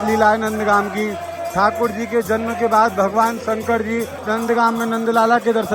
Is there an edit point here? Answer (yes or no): yes